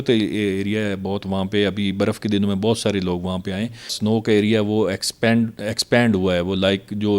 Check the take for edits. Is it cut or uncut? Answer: cut